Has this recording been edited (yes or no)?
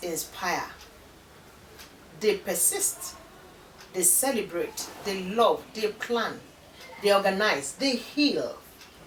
no